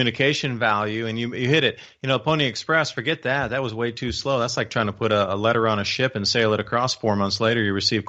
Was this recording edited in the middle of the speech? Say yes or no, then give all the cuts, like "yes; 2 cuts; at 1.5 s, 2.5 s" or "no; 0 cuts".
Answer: no; 0 cuts